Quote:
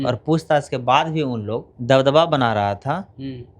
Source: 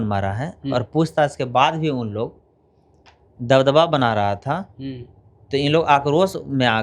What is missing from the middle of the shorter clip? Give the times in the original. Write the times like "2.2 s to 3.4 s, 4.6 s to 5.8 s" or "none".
2.4 s to 3.3 s